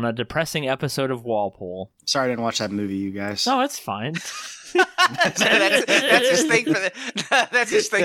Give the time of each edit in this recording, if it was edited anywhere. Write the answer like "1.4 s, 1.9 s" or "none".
1.9 s

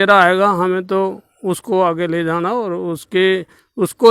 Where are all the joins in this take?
none

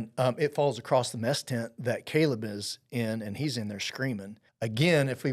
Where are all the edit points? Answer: 4.4 s

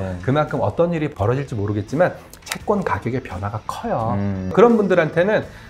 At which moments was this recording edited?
1.1 s, 4.5 s

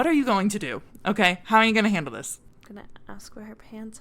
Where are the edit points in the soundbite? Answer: 2.5 s

